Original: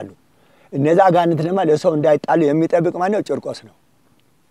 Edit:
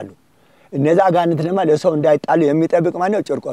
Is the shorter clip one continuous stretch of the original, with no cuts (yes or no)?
yes